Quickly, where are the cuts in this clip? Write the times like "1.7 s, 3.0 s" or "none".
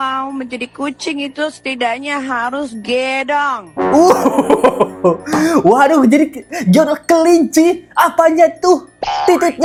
none

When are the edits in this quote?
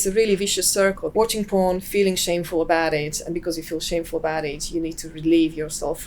1.0 s

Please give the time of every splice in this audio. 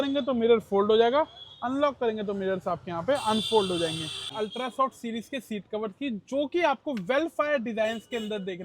4.2 s

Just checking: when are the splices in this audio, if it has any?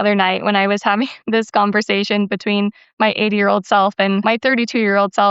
4.2 s

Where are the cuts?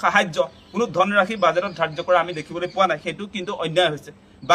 2.1 s

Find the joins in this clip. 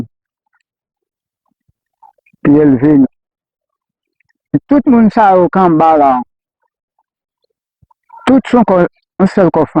4.5 s

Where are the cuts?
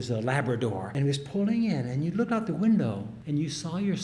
0.9 s, 3.1 s

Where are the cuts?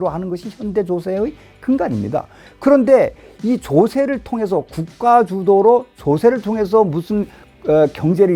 none

